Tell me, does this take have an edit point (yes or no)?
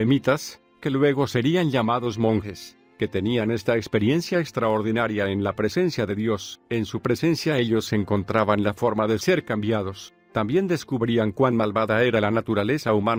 no